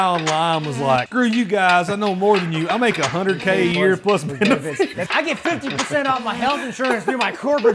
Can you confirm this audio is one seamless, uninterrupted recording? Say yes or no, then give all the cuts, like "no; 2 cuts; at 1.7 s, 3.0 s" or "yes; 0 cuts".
no; 2 cuts; at 1.1 s, 5.0 s